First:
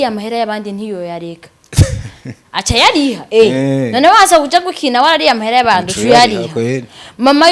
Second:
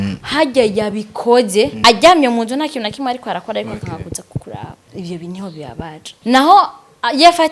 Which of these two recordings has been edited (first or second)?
second